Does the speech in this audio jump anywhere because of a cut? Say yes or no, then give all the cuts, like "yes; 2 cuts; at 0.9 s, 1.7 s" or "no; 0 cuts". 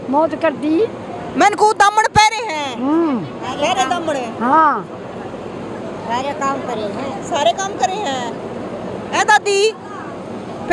no; 0 cuts